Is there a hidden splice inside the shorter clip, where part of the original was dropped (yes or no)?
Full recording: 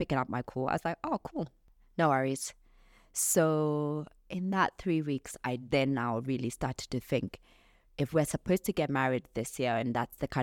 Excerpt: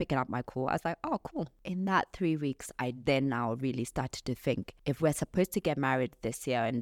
yes